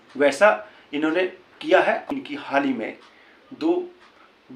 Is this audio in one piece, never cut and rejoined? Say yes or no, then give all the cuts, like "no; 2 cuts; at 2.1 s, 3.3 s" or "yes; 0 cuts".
no; 1 cut; at 2.0 s